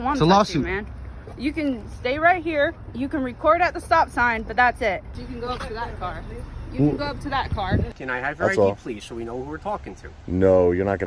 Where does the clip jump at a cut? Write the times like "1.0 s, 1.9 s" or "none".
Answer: 5.2 s, 8.0 s